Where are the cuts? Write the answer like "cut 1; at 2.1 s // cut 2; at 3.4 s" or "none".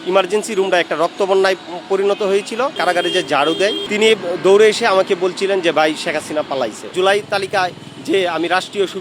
cut 1; at 2.7 s // cut 2; at 3.8 s // cut 3; at 6.9 s